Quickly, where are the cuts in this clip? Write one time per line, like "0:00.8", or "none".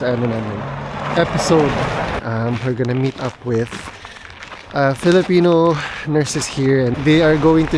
0:02.2